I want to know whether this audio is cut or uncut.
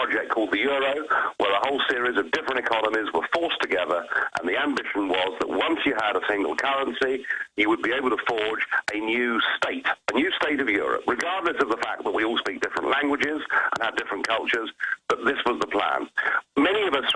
uncut